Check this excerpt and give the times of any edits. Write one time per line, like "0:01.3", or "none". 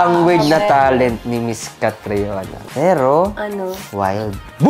0:01.2
0:02.6
0:03.8